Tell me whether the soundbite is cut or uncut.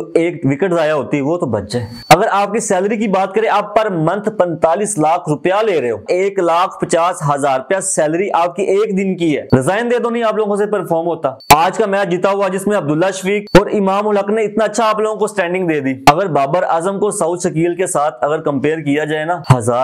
cut